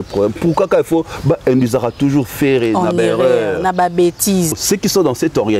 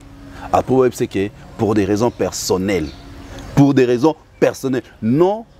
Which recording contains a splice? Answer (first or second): first